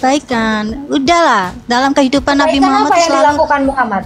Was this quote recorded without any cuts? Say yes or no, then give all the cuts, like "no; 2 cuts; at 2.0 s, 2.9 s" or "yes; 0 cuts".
yes; 0 cuts